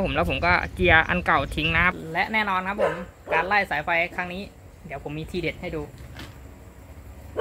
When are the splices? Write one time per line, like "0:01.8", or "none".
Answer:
0:02.1